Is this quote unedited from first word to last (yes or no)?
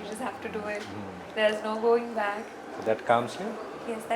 yes